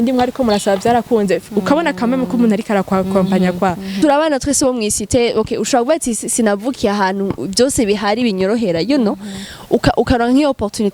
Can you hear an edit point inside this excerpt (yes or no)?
yes